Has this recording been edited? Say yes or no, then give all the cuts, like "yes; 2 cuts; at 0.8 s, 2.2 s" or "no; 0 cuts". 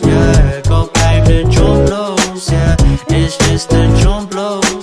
yes; 1 cut; at 0.9 s